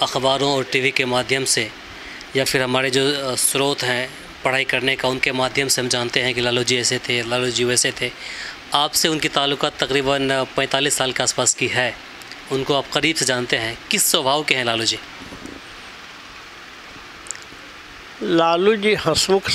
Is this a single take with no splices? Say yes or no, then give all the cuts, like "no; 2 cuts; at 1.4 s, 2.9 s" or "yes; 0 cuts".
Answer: yes; 0 cuts